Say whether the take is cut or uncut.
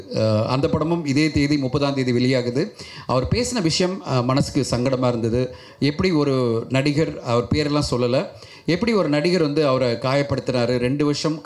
uncut